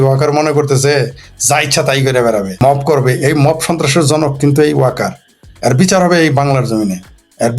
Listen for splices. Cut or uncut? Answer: cut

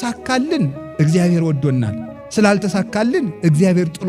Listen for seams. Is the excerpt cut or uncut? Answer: uncut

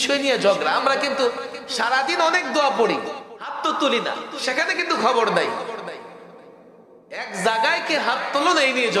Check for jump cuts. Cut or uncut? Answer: cut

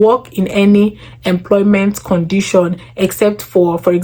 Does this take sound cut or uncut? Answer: uncut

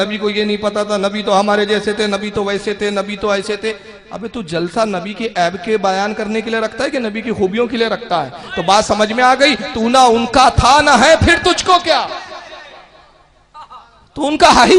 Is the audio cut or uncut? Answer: uncut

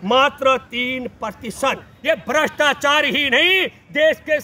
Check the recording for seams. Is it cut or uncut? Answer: cut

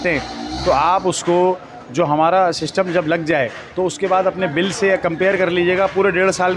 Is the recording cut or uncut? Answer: uncut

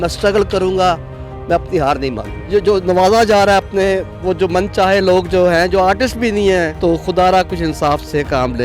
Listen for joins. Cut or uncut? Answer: cut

